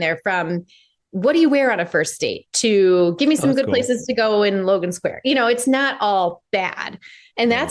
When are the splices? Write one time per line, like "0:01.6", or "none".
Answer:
none